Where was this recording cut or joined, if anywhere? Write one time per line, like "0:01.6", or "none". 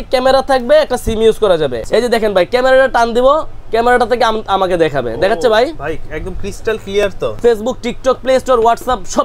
0:01.8
0:07.4